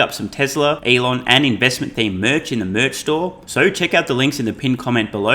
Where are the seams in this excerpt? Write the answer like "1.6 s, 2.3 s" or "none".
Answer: 0.8 s, 3.4 s